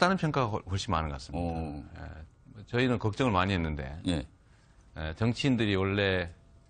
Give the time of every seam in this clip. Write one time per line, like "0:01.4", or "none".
0:04.8